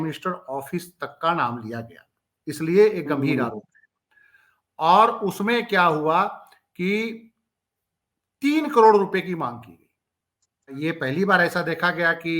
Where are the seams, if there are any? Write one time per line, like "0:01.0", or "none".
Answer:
0:10.7